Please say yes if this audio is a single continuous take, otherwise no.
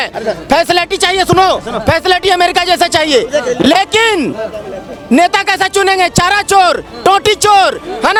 yes